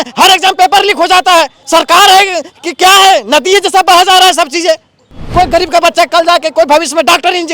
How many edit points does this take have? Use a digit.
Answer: 2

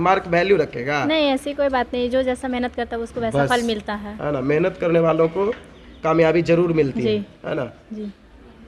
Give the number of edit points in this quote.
0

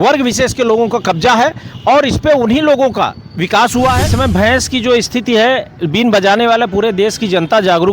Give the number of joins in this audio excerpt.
1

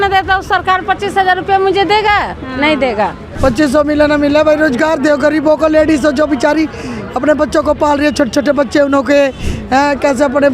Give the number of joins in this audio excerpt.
1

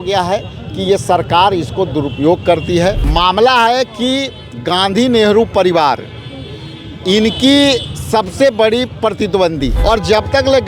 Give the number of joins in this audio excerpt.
2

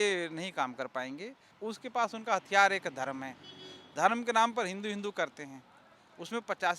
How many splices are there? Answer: 1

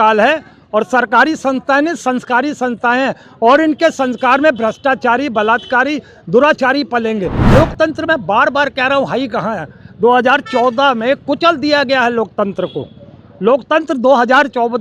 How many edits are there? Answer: 1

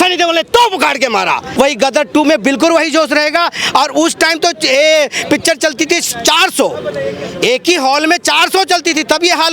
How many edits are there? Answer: 1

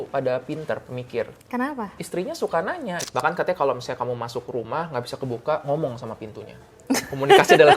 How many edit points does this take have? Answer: 1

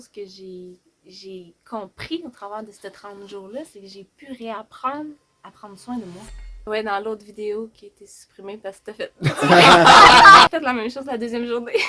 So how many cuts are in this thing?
2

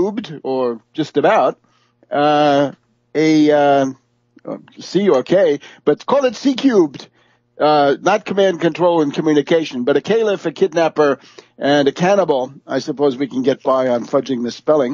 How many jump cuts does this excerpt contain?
0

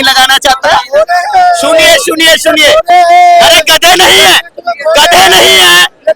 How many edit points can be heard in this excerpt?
0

